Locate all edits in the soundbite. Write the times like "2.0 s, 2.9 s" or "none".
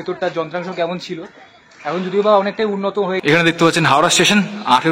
3.2 s